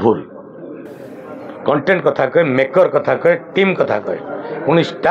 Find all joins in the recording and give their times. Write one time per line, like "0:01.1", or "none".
none